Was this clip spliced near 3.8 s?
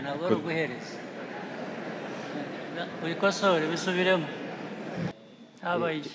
no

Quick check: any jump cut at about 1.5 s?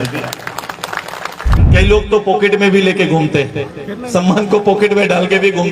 yes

